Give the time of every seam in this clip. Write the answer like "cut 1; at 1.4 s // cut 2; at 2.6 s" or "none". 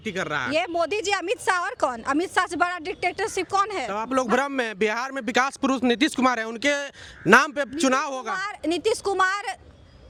none